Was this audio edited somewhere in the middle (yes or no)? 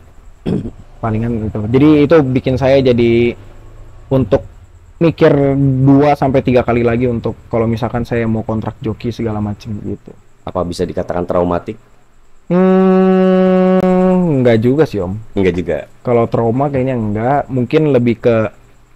no